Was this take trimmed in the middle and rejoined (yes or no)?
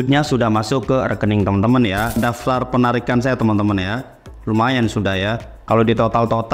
yes